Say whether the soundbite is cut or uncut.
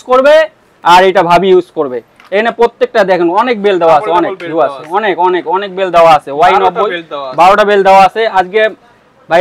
uncut